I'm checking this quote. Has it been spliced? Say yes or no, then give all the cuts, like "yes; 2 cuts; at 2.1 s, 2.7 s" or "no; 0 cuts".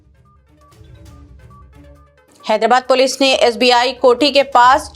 yes; 1 cut; at 1.4 s